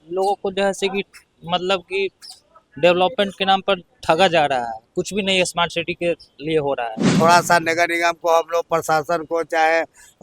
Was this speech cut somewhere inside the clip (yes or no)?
yes